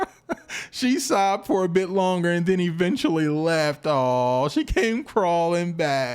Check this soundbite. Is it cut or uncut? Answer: uncut